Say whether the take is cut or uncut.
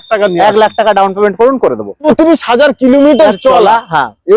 cut